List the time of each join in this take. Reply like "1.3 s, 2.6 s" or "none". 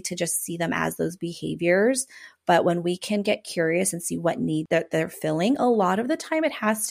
4.6 s